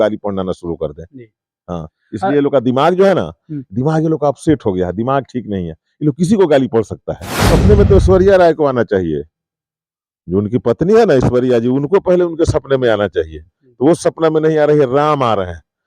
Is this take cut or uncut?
cut